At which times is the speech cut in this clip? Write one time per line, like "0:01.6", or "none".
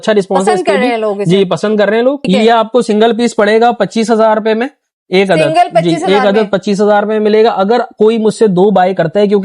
0:02.3